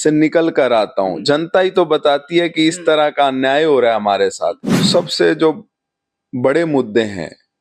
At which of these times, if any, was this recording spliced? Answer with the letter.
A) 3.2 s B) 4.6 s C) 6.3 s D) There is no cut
B